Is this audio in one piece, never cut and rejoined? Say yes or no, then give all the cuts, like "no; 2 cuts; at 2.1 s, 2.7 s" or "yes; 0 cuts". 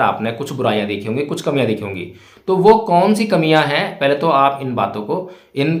yes; 0 cuts